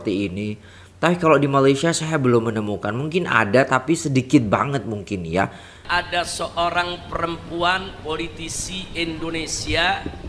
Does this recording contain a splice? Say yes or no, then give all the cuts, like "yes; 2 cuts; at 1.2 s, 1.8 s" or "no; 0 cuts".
yes; 1 cut; at 5.8 s